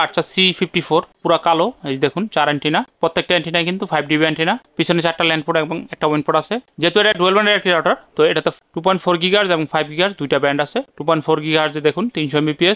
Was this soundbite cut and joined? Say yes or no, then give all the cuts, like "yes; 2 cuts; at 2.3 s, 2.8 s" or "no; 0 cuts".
no; 0 cuts